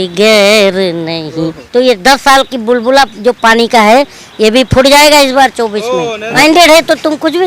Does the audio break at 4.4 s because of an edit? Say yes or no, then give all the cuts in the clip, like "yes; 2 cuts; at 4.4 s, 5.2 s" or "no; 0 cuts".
no; 2 cuts; at 1.6 s, 6.2 s